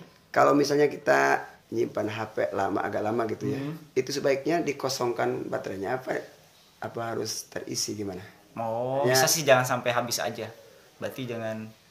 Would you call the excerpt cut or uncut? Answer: cut